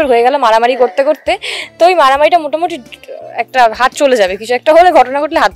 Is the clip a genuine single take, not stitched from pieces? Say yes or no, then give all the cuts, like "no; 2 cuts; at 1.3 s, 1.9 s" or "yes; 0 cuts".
yes; 0 cuts